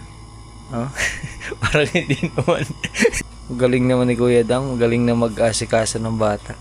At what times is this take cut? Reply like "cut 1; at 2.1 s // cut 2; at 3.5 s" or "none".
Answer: cut 1; at 3.1 s